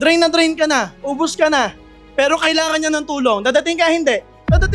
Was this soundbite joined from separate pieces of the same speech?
no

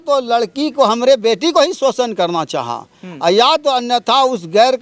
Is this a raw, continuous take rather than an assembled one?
yes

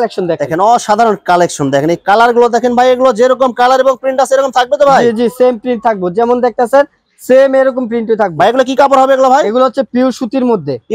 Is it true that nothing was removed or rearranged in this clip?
yes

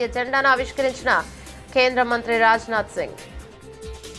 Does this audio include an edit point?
no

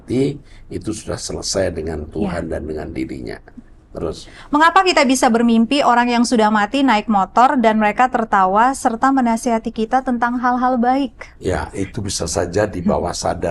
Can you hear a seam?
no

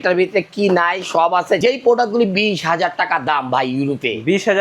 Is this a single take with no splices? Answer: no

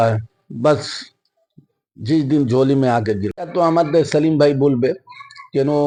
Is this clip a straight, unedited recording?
yes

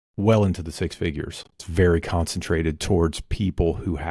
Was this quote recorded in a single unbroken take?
no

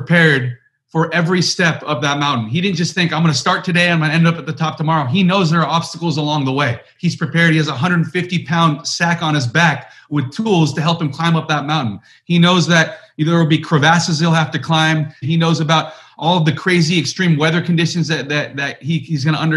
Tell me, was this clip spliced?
yes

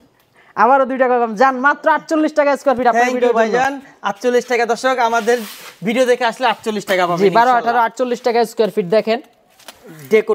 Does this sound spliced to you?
no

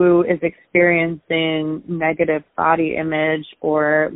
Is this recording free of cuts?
yes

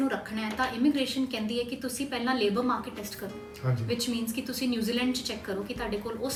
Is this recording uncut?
yes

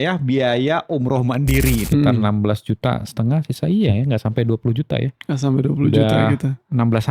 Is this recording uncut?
no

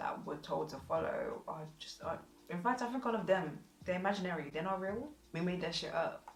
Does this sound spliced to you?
no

